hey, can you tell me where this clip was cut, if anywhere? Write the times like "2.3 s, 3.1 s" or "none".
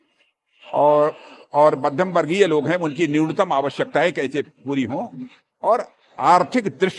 none